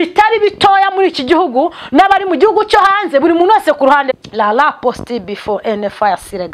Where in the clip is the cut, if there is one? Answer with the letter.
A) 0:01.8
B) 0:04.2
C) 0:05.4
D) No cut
B